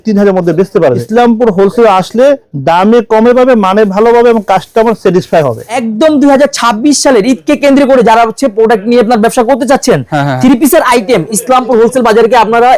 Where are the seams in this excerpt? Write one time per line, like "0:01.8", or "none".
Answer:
0:01.0
0:05.8